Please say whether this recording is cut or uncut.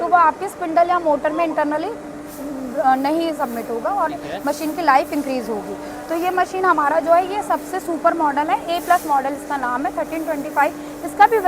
uncut